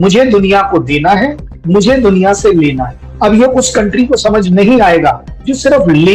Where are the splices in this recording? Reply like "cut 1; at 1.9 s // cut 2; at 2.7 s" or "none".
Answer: none